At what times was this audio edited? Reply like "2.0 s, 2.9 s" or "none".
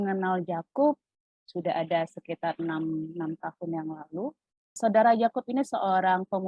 1.1 s, 4.8 s